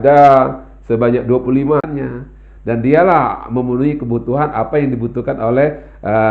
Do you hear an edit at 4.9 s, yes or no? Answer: no